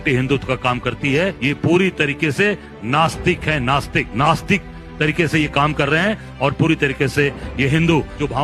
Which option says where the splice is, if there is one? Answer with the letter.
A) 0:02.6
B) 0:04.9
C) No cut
C